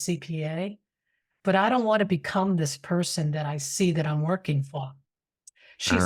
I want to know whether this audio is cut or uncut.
uncut